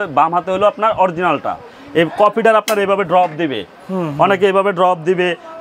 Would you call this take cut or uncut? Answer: uncut